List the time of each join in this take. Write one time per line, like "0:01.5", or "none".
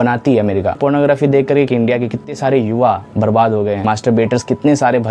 0:00.8
0:01.7
0:03.8